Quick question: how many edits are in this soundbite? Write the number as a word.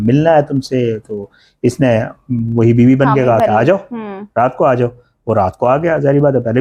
zero